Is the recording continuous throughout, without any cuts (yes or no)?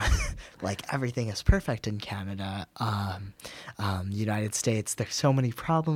yes